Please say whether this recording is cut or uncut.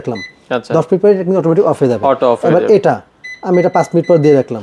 uncut